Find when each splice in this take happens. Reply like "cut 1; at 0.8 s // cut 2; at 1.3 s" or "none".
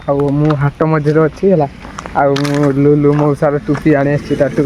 none